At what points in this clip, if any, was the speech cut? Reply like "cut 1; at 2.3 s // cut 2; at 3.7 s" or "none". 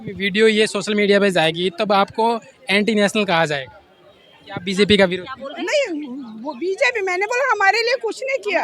none